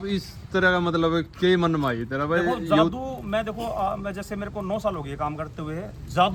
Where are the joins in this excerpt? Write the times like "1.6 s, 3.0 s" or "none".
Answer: none